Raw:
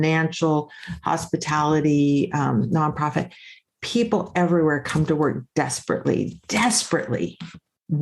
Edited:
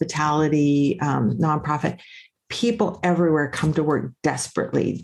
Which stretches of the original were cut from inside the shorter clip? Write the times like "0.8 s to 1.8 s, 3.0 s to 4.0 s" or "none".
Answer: none

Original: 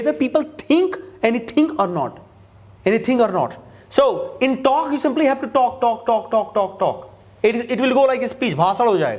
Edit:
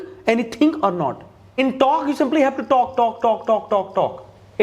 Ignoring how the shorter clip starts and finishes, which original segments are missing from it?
2.4 s to 4.3 s

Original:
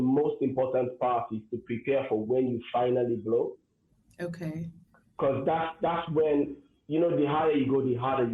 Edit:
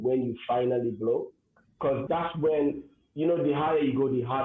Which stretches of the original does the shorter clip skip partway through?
4.2 s to 5.7 s

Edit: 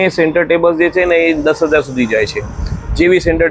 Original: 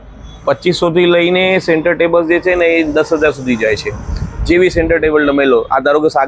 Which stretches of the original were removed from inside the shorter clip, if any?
none

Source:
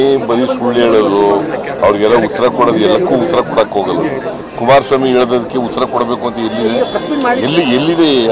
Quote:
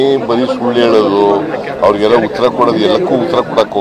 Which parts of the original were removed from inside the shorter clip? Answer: none

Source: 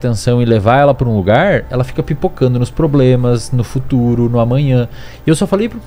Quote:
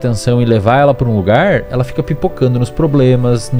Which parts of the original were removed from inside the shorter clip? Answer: none

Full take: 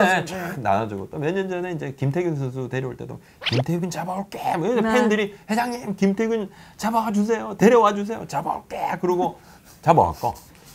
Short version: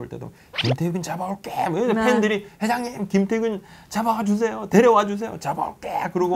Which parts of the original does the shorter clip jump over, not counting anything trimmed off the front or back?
none

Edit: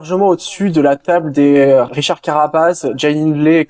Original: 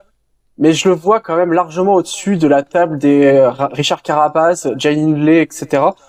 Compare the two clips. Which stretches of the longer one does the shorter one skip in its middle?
3.6 s to 3.7 s

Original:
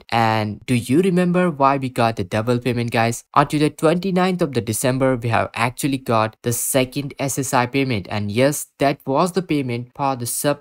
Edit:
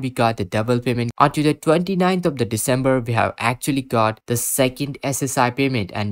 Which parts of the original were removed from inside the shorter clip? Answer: 2.9 s to 3.2 s

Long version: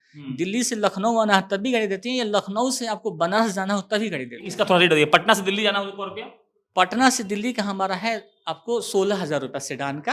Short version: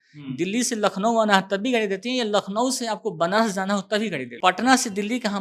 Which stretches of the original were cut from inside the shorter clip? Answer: 4.2 s to 6.6 s

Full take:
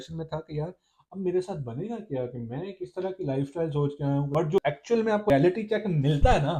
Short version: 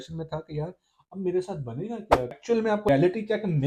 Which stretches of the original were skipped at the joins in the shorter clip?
2.4 s to 4.8 s

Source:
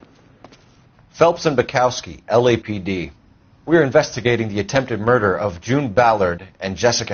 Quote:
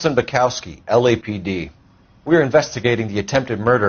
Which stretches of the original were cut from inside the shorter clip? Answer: none

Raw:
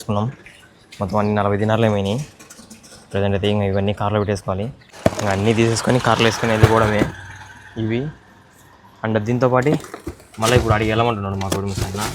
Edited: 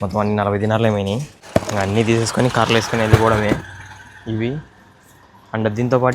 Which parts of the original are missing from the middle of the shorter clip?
2.3 s to 4.8 s

